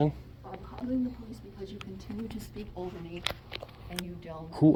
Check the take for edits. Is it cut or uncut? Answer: uncut